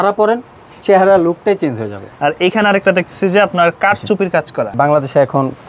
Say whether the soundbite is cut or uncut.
cut